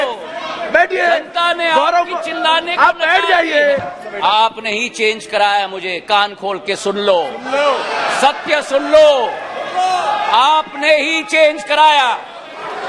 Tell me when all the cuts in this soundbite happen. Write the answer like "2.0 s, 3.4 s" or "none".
4.1 s

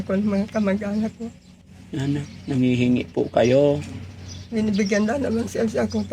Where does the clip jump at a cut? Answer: none

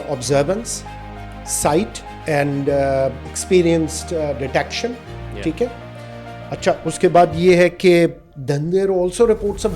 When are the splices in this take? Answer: 2.1 s, 8.3 s

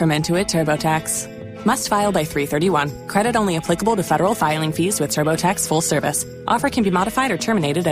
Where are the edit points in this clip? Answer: none

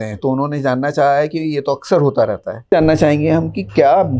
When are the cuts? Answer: 2.7 s

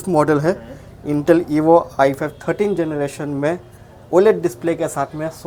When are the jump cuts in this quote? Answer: none

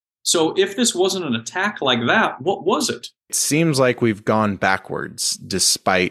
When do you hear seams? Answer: 3.4 s

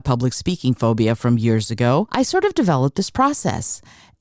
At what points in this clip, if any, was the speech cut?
2.1 s

